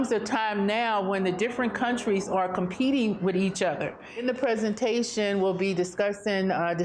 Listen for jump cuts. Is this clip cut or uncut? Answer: cut